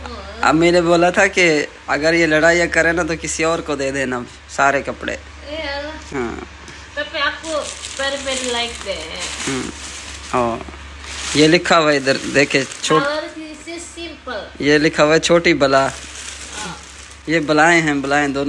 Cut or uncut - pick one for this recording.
uncut